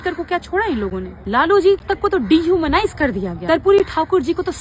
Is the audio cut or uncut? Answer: cut